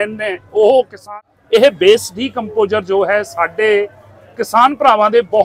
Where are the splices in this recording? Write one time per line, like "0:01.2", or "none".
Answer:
0:01.0